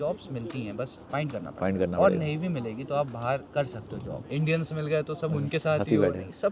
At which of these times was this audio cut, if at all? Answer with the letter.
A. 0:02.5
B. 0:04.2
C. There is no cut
B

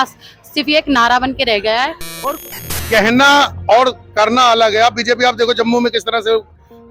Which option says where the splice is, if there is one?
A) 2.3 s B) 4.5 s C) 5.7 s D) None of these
A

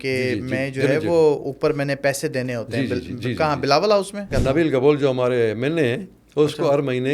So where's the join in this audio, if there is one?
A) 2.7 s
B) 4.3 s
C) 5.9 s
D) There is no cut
B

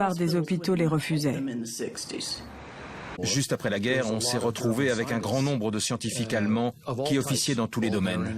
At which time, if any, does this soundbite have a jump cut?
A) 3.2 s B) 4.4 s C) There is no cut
A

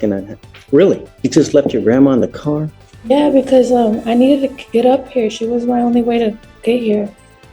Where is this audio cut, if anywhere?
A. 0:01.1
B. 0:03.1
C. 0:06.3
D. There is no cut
A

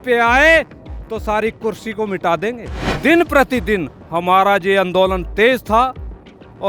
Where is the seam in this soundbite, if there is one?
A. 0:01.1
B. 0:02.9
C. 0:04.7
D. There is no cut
B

